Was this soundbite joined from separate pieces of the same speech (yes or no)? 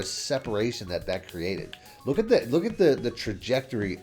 yes